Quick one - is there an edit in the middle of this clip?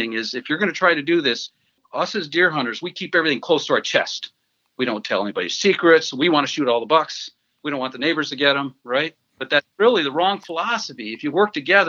yes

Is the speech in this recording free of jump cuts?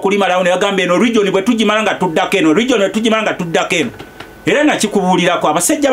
yes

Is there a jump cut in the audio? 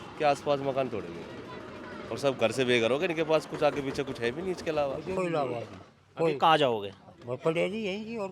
yes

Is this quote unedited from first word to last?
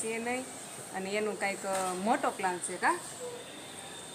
yes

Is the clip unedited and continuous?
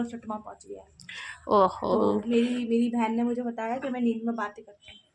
yes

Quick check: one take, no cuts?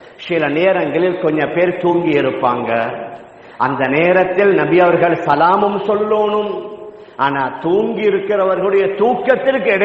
yes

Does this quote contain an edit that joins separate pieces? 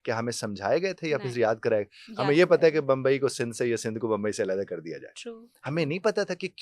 no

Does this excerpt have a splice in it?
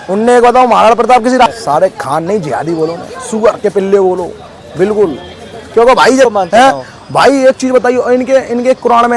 yes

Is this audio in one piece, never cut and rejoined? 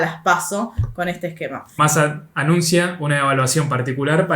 no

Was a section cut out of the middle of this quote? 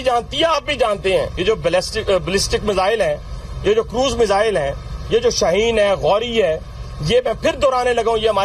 yes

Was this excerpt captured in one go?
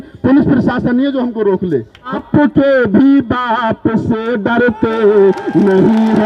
no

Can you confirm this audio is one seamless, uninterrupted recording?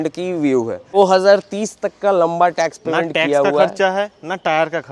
no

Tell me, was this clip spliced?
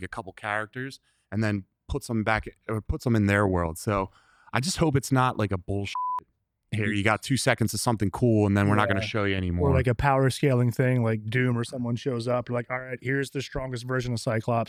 no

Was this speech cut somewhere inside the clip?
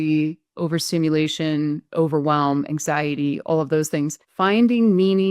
yes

